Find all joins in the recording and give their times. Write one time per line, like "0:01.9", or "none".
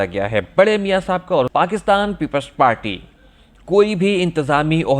0:01.5

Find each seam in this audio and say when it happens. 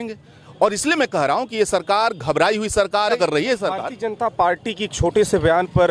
0:03.2

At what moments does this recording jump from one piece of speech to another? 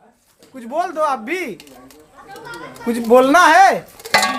none

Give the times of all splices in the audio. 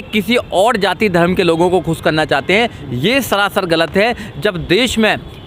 none

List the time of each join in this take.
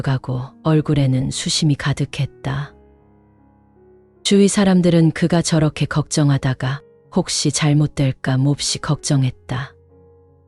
0:02.7
0:04.2

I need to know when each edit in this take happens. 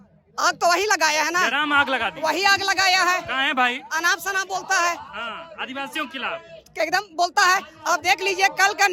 none

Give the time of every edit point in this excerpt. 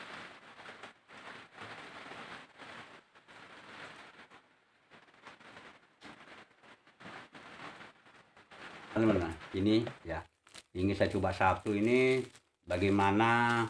0:09.0

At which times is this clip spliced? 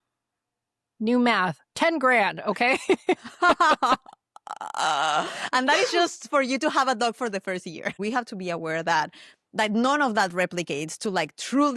0:08.0

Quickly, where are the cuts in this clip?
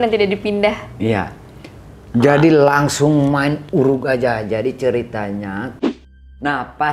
0:05.9

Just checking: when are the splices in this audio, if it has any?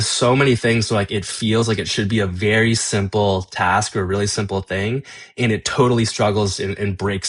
none

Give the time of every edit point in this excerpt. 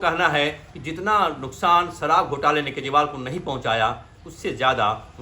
none

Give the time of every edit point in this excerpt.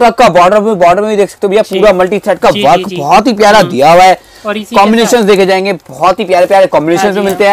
none

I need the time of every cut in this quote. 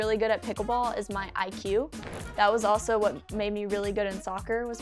0:03.3

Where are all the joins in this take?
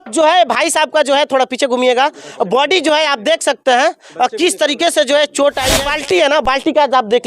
0:05.9

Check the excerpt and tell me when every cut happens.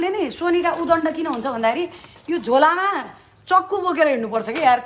none

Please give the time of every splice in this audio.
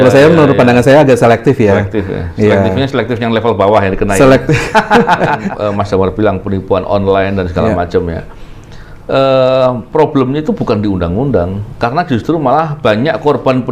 0:05.5

